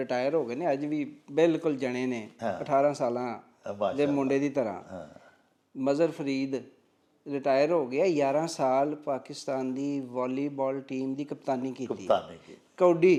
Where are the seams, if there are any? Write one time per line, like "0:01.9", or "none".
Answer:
none